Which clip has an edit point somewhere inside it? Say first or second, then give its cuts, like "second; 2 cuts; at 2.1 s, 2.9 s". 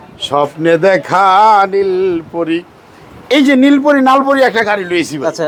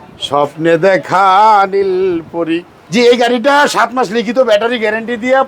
second; 1 cut; at 2.8 s